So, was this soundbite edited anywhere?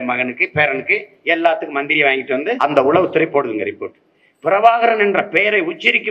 yes; 1 cut; at 2.6 s

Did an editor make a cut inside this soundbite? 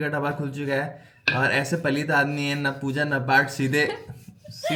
no; 0 cuts

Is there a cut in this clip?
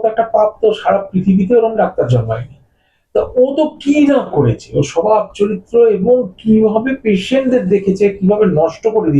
no; 0 cuts

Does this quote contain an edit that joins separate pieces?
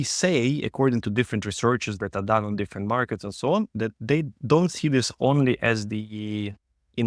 no; 0 cuts

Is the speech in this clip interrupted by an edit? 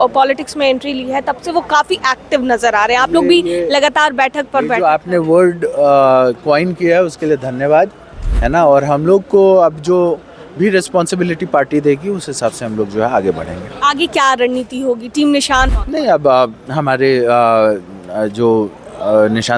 yes; 1 cut; at 15.8 s

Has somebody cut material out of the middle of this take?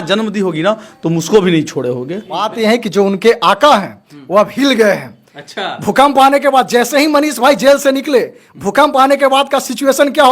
yes; 1 cut; at 2.5 s

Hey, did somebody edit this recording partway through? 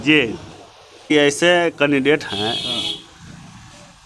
yes; 1 cut; at 1.1 s

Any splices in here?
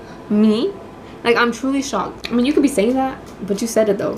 yes; 1 cut; at 2.2 s

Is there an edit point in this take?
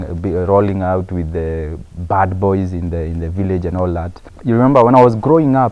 yes; 1 cut; at 4.2 s

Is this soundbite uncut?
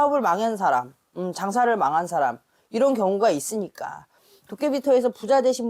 no; 1 cut; at 4.2 s

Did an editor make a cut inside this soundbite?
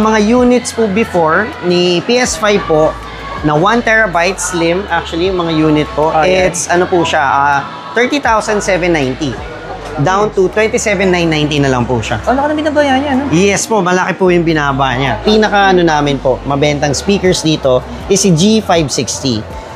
yes; 1 cut; at 15.2 s

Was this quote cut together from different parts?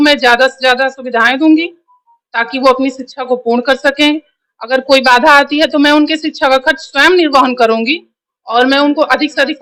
no; 0 cuts

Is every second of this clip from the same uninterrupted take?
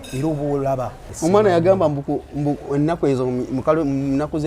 no; 1 cut; at 1.0 s

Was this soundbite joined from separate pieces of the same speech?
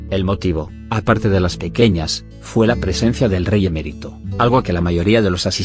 no; 0 cuts

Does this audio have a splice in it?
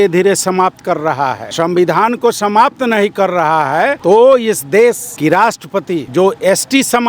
yes; 4 cuts; at 1.4 s, 4.0 s, 5.1 s, 6.1 s

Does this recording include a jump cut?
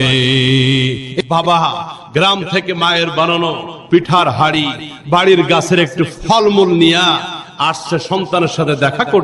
yes; 1 cut; at 1.1 s

